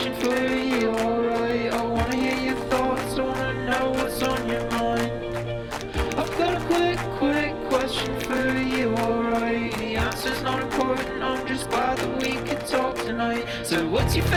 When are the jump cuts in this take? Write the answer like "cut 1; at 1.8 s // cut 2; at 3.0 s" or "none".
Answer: none